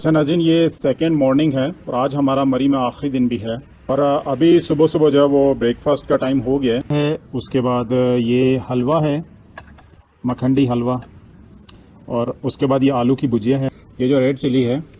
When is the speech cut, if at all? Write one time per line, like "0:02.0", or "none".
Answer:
0:06.9
0:13.8

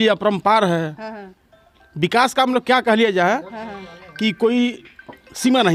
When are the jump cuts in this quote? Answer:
none

